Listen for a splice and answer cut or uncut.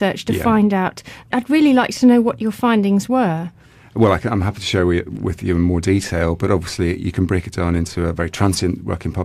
uncut